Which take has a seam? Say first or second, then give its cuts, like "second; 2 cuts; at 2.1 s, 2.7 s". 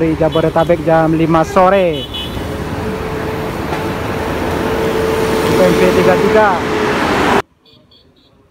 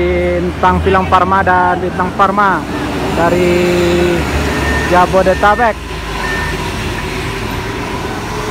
first; 1 cut; at 7.4 s